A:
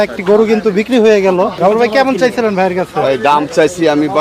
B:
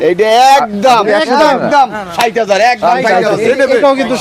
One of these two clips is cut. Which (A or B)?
A